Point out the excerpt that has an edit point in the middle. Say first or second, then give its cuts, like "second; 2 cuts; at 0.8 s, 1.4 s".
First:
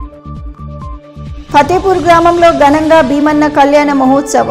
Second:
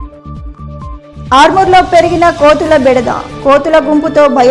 first; 1 cut; at 1.1 s